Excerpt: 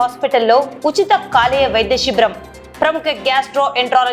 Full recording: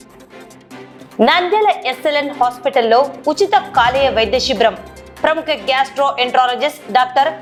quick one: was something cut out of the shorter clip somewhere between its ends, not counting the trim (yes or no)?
no